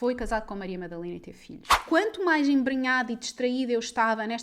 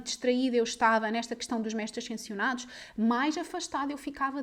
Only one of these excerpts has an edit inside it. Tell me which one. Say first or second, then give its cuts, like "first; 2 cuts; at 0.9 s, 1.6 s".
first; 1 cut; at 1.8 s